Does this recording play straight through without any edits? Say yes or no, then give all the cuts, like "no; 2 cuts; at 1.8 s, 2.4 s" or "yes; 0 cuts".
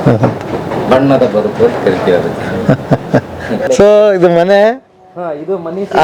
no; 1 cut; at 3.6 s